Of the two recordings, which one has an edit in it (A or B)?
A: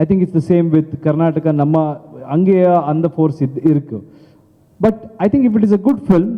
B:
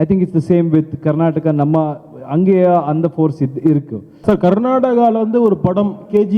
B